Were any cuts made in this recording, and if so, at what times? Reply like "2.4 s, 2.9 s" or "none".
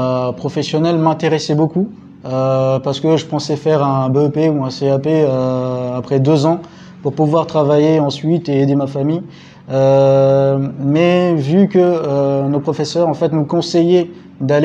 none